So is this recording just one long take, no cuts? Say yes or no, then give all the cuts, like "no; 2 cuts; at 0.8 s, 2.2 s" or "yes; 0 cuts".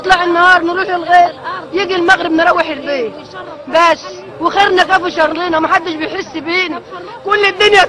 yes; 0 cuts